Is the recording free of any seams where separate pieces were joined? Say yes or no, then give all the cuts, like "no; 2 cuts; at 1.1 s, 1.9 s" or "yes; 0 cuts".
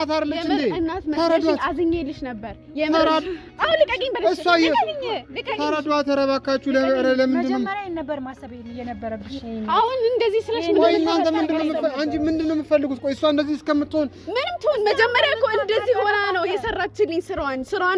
yes; 0 cuts